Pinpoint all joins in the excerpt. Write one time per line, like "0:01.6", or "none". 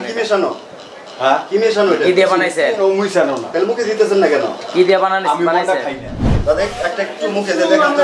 0:06.3